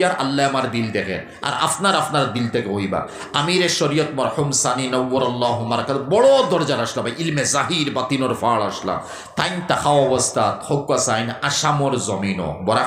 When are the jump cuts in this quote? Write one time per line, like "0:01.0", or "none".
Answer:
none